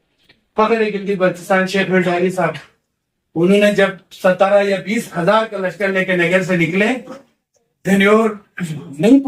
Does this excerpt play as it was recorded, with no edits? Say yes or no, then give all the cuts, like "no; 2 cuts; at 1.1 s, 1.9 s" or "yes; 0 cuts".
yes; 0 cuts